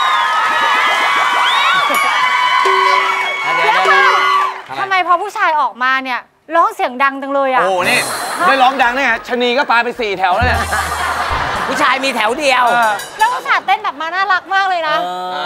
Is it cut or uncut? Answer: cut